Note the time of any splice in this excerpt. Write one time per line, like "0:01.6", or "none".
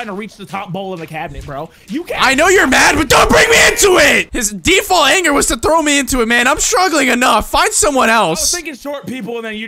0:04.3